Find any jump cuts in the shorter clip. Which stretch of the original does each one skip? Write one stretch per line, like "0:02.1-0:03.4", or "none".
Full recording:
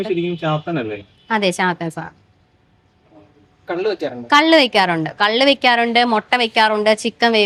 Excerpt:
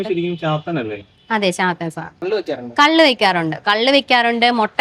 0:02.2-0:03.8